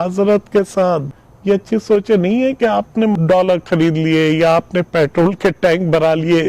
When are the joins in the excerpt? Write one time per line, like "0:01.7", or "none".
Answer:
0:01.1
0:03.1